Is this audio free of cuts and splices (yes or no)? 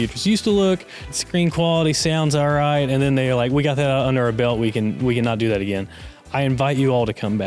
no